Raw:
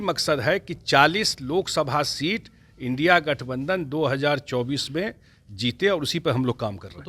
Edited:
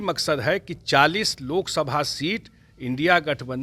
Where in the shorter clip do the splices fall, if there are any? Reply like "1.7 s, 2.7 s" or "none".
none

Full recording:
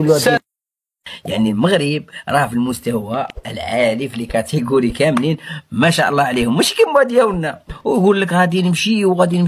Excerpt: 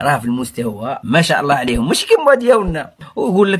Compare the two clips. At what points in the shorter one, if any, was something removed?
1.0 s

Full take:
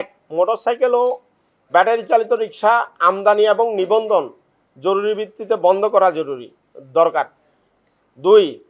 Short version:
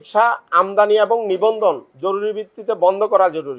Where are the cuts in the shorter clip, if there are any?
1.9 s

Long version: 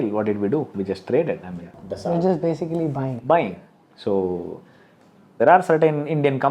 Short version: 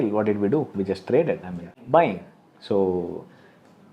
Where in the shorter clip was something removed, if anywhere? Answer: 1.8 s

